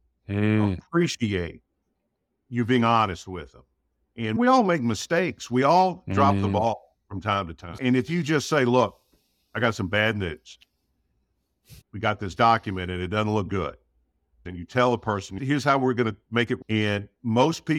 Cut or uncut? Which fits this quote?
cut